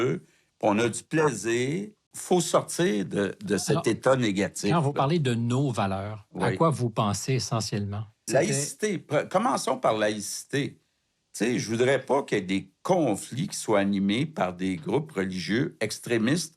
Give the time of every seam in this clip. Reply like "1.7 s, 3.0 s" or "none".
2.0 s, 8.3 s